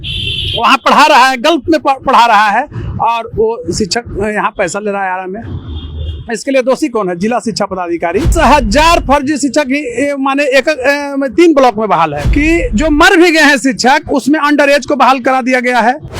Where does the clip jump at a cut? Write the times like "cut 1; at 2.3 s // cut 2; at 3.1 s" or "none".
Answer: cut 1; at 8.3 s // cut 2; at 12.2 s

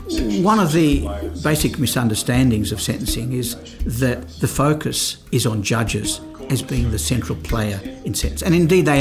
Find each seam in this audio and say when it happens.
cut 1; at 1.2 s // cut 2; at 5.1 s

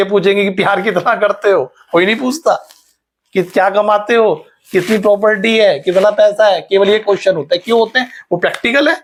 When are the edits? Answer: none

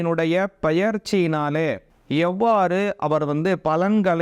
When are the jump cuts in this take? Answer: cut 1; at 2.0 s

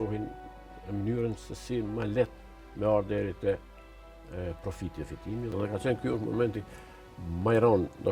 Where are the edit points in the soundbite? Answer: cut 1; at 5.5 s

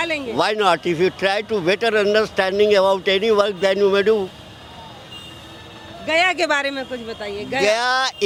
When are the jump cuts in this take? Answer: none

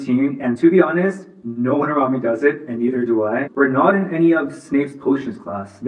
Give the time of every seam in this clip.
cut 1; at 3.5 s

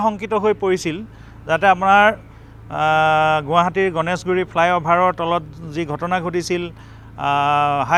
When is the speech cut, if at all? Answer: none

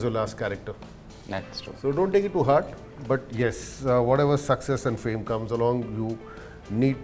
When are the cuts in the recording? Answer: none

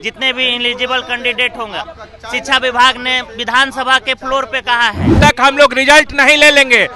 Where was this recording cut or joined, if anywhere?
cut 1; at 5.2 s

